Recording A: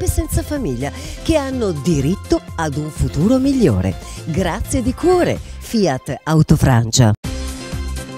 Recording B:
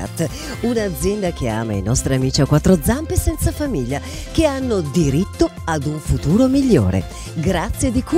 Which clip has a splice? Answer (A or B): A